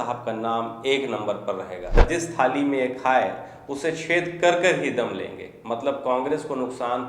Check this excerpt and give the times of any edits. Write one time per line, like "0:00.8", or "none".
0:02.0